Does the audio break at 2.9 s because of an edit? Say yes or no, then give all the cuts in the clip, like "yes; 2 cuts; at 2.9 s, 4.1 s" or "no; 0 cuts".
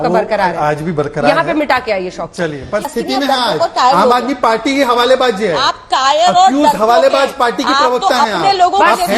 yes; 1 cut; at 2.9 s